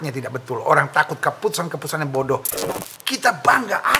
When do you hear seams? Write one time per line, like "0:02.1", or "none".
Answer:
0:02.5